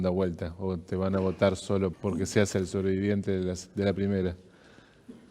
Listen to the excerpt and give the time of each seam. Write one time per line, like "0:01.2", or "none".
0:01.9